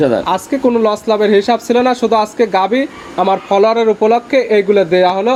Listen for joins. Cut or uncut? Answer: uncut